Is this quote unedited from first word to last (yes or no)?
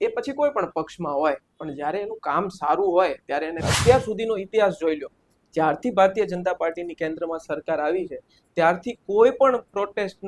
no